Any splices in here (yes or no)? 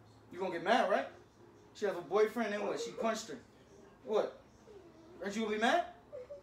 no